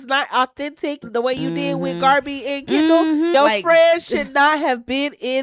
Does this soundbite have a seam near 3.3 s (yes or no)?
yes